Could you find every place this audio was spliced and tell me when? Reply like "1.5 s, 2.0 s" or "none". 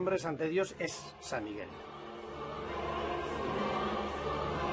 none